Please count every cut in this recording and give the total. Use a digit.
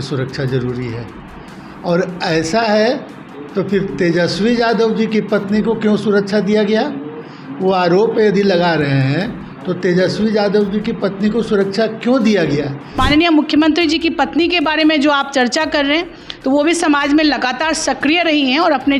1